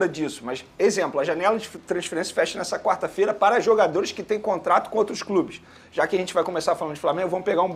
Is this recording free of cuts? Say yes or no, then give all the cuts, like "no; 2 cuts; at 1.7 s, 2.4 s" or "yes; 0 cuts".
yes; 0 cuts